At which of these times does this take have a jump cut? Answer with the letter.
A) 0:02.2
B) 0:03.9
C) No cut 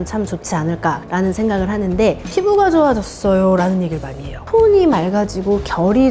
A